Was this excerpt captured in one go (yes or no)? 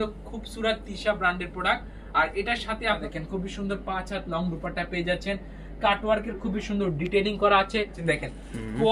no